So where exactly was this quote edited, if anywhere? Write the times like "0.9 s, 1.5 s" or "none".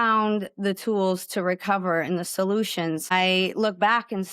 3.1 s